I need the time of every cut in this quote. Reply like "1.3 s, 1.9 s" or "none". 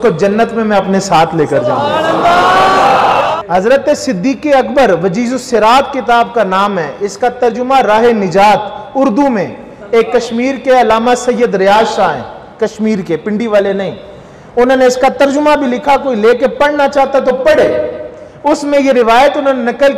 3.3 s